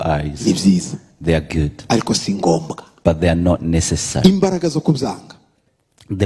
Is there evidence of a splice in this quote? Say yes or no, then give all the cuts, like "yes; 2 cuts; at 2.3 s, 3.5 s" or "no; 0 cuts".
no; 0 cuts